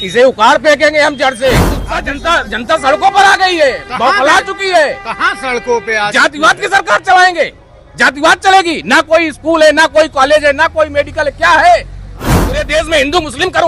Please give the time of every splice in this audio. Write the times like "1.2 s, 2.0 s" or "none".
1.9 s, 12.4 s